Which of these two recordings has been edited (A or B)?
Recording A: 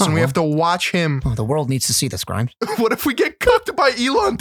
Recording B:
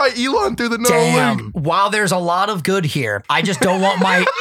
B